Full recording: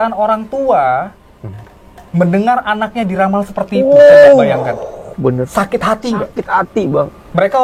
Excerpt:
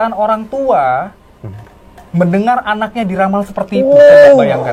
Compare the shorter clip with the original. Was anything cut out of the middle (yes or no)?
no